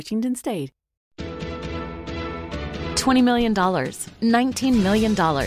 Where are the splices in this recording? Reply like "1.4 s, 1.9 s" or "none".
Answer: 1.0 s